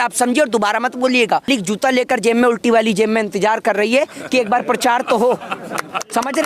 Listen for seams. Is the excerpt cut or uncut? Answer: cut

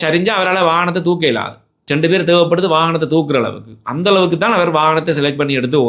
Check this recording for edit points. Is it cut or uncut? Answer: uncut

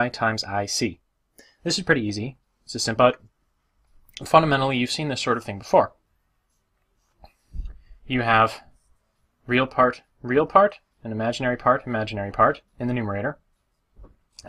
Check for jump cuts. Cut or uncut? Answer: uncut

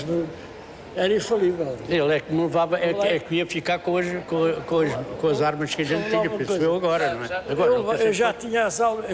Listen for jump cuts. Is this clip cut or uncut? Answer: uncut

